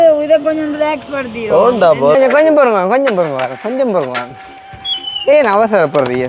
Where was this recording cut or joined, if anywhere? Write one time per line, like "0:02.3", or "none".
0:02.2